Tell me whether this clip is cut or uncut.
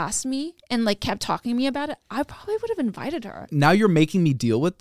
cut